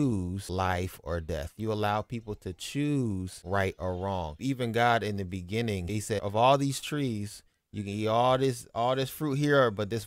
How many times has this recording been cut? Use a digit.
2